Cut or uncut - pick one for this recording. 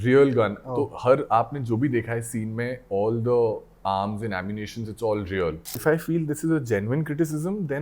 cut